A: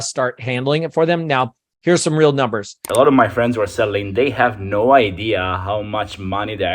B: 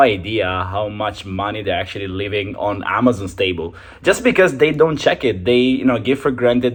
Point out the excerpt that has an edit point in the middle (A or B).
A